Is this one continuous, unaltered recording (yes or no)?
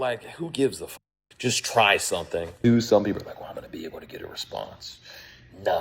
no